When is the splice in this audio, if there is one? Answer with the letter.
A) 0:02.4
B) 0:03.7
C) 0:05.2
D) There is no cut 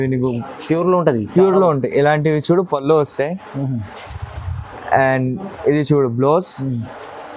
D